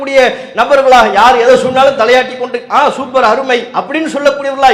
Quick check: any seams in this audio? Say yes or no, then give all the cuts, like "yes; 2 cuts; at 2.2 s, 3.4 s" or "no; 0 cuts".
no; 0 cuts